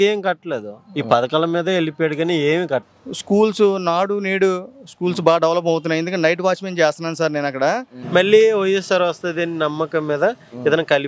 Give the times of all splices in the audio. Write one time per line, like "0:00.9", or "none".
0:02.9
0:08.0